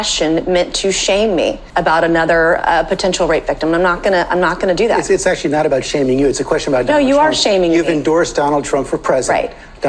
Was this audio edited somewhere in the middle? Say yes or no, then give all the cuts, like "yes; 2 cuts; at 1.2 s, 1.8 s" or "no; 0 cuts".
yes; 1 cut; at 1.6 s